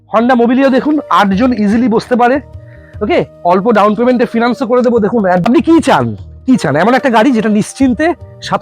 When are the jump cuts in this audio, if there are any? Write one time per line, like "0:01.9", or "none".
0:05.4